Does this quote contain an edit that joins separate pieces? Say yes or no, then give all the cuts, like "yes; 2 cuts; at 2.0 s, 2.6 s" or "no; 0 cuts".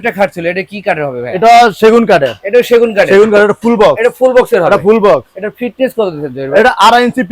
no; 0 cuts